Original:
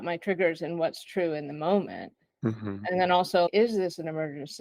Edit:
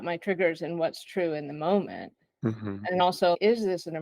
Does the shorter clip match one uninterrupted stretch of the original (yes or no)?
no